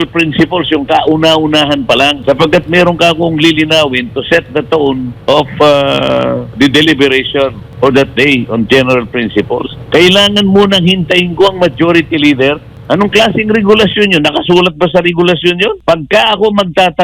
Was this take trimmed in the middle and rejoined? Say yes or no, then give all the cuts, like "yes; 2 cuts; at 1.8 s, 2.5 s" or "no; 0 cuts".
yes; 7 cuts; at 2.2 s, 5.1 s, 6.5 s, 7.6 s, 9.8 s, 12.7 s, 15.8 s